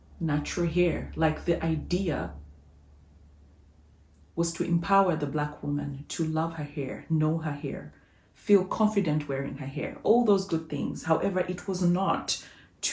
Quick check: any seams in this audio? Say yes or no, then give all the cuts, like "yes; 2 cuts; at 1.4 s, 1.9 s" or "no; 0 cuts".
no; 0 cuts